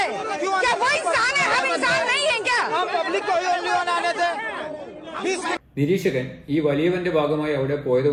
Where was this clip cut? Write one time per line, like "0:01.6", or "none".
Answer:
none